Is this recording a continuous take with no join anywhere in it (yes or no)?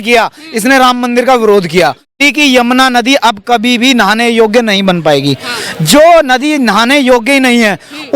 no